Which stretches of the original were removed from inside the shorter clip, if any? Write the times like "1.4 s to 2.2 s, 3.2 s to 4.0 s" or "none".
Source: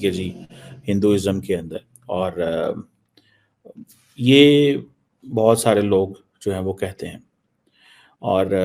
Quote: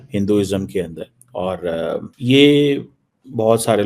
2.9 s to 4.1 s